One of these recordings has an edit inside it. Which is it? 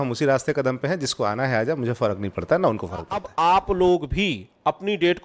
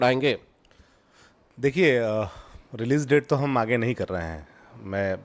first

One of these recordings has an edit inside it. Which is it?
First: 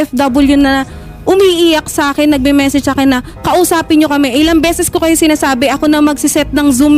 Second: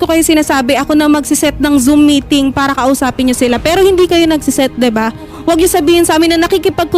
second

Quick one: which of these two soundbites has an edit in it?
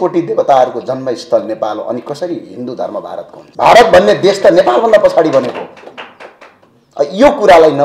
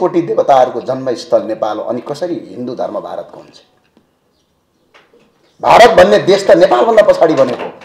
first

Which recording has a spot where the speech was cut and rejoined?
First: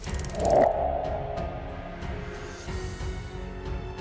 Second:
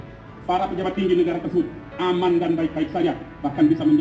first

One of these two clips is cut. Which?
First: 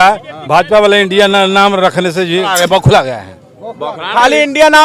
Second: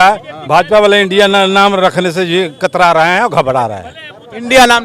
first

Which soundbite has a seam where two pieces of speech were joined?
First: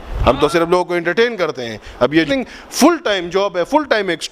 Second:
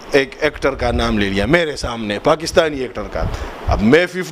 first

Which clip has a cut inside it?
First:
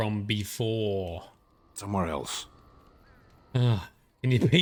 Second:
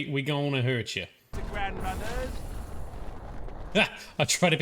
second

